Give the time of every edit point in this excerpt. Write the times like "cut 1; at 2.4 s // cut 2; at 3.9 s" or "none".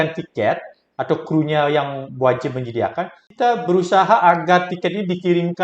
cut 1; at 3.2 s